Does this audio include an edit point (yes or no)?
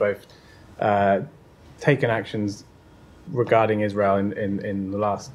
no